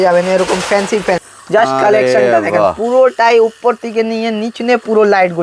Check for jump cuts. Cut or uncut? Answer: cut